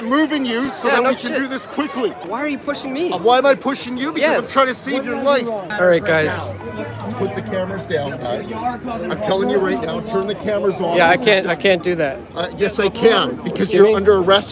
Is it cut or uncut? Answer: cut